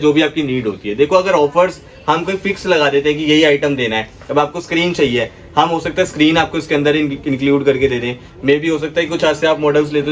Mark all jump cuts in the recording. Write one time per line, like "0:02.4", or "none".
none